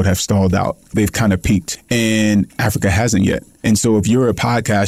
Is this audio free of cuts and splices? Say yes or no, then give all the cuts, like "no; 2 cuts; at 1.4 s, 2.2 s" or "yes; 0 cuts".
no; 3 cuts; at 0.8 s, 1.7 s, 3.6 s